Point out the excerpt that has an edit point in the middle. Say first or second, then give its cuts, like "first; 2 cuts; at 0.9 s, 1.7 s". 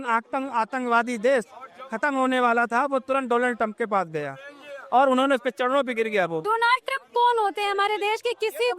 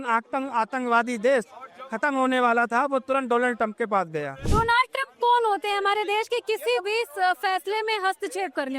second; 1 cut; at 4.5 s